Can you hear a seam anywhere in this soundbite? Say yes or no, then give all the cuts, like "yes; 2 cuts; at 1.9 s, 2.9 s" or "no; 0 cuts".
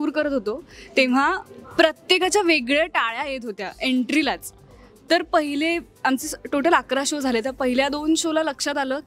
no; 0 cuts